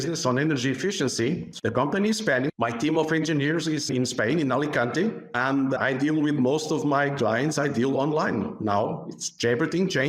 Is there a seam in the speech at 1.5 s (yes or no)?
yes